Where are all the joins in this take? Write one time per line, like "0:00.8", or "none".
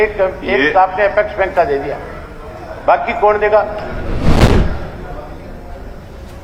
none